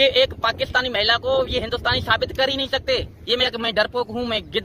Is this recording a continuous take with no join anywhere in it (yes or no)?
no